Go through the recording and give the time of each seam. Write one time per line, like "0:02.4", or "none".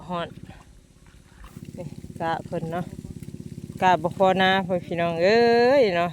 0:01.5

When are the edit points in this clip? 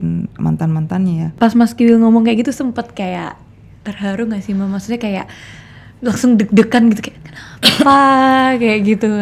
0:01.2

